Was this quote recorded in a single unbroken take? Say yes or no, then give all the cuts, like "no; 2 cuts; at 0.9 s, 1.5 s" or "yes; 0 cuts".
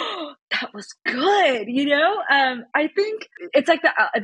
no; 1 cut; at 3.3 s